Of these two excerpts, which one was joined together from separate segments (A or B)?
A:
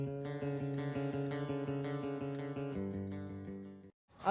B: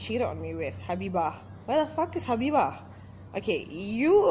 B